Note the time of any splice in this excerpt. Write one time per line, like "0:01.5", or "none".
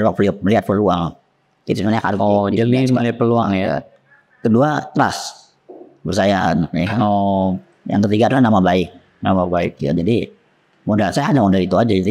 none